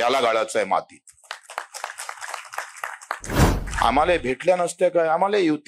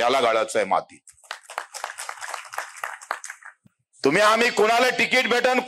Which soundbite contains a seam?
first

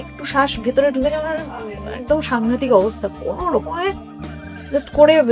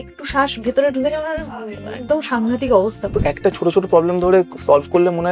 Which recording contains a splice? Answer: second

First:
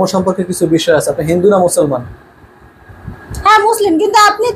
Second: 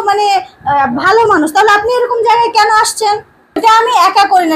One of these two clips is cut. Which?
second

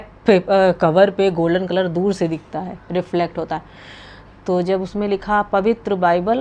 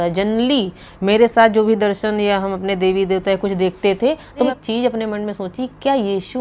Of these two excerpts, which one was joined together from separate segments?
second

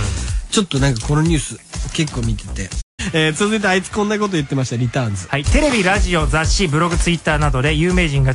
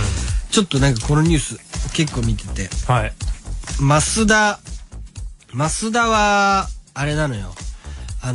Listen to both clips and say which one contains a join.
second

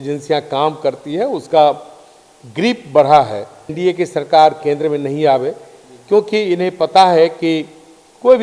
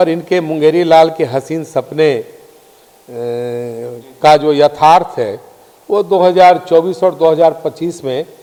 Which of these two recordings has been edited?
first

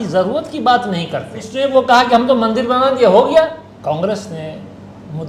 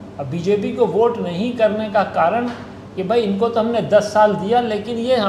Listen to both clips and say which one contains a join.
first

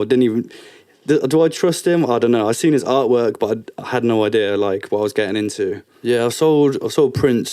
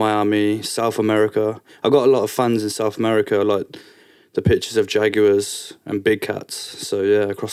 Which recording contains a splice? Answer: first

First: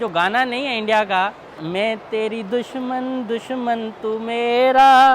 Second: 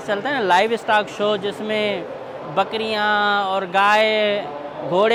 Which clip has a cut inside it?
first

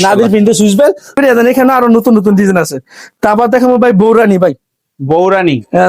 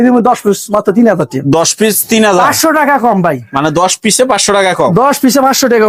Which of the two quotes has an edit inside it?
first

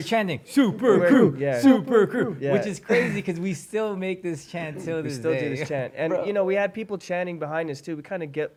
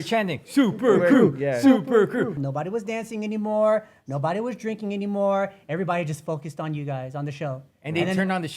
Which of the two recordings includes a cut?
second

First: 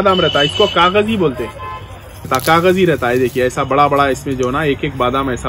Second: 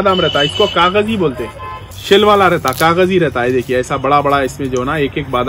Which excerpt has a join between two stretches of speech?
first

